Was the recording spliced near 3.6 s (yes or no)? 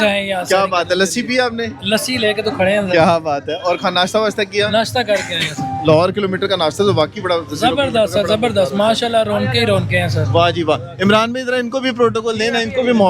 no